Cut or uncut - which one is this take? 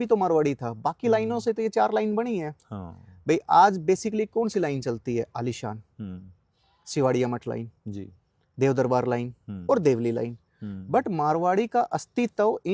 uncut